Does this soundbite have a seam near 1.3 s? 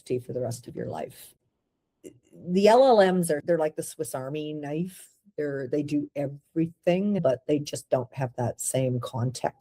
yes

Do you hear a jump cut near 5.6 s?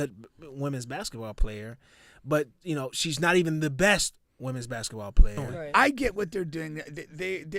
yes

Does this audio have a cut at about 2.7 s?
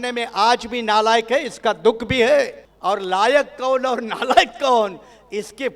yes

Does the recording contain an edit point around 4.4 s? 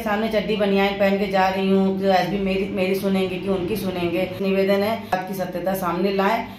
yes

